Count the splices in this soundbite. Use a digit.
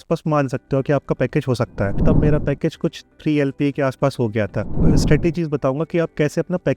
2